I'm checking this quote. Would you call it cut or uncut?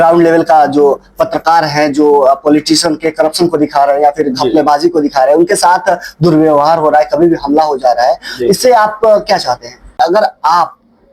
cut